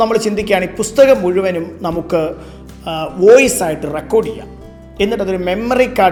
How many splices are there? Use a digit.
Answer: 0